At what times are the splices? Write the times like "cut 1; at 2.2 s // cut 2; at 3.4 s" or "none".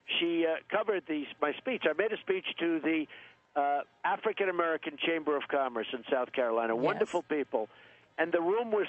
none